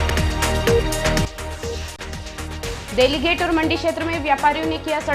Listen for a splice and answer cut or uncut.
cut